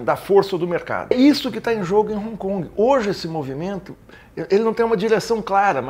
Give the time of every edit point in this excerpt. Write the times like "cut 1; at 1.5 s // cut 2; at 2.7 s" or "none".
cut 1; at 1.1 s